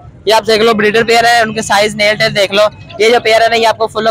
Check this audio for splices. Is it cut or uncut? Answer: uncut